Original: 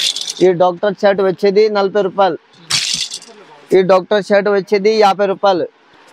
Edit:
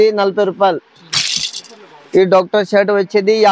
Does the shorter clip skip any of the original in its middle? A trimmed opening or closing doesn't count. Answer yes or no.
no